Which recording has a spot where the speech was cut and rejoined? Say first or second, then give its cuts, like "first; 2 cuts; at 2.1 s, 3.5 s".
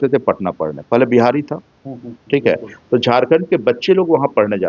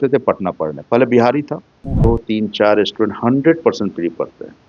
second; 1 cut; at 1.9 s